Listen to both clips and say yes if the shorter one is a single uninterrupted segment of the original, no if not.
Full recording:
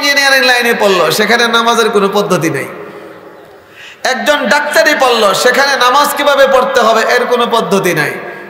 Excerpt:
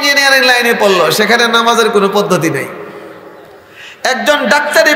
yes